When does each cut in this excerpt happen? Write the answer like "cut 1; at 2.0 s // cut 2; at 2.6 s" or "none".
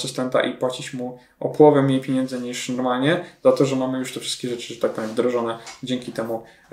none